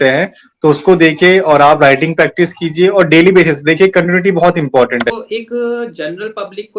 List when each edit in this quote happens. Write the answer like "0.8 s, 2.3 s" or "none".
5.2 s